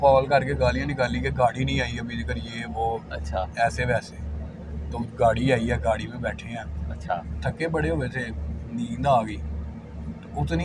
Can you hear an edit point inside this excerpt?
no; 0 cuts

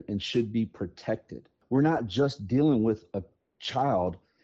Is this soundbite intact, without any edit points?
no; 1 cut; at 1.6 s

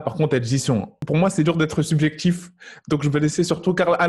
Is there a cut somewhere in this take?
yes; 1 cut; at 1.0 s

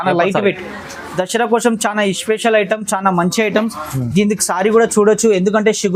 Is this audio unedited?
yes; 0 cuts

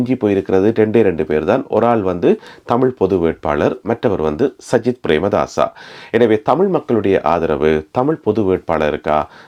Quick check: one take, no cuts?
yes; 0 cuts

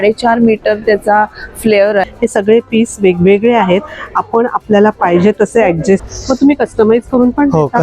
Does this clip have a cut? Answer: yes; 2 cuts; at 2.1 s, 6.0 s

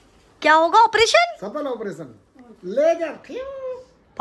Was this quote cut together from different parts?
no; 0 cuts

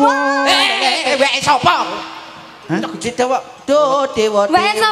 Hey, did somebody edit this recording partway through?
no; 0 cuts

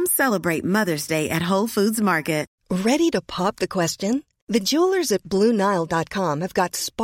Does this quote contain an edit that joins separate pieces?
yes; 1 cut; at 2.6 s

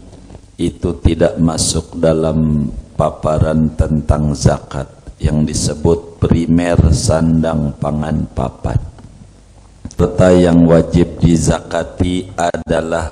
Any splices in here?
yes; 1 cut; at 10.0 s

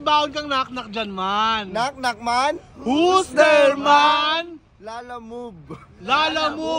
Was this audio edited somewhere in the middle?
no; 0 cuts

